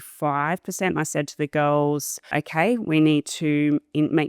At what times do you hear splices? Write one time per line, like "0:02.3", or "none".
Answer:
0:02.3